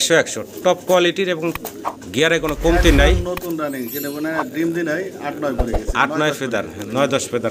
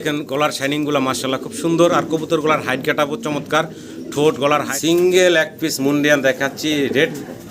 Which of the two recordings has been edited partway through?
second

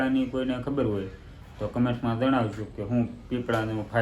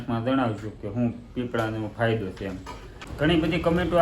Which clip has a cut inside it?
second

